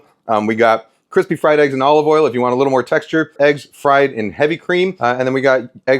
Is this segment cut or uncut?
cut